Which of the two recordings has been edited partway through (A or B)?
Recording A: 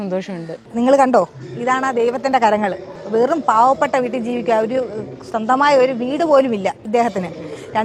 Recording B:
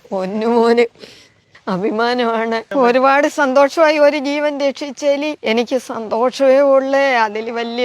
B